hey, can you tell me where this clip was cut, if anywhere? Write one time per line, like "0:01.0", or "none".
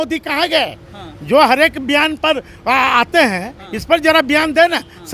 none